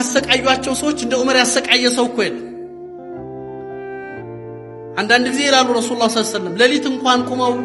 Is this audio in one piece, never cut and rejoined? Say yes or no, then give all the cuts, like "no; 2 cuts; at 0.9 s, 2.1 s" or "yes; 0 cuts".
yes; 0 cuts